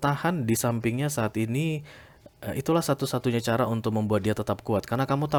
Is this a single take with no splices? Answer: yes; 0 cuts

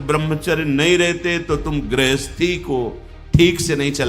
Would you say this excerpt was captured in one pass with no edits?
yes; 0 cuts

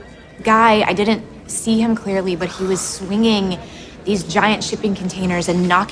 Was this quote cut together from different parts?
no; 0 cuts

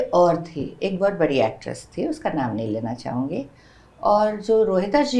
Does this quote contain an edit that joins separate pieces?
no; 0 cuts

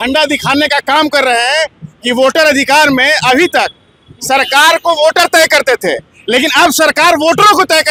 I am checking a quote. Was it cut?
no; 0 cuts

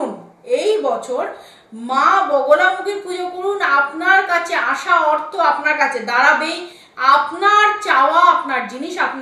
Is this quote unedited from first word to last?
yes; 0 cuts

